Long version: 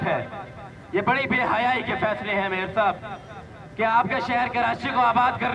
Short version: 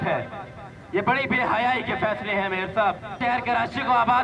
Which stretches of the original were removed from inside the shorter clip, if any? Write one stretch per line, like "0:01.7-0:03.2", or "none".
0:03.2-0:04.3